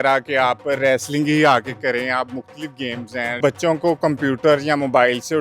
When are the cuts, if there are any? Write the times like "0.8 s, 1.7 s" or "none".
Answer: 3.4 s